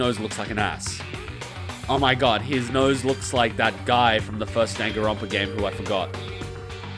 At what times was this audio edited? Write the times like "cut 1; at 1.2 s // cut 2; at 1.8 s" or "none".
none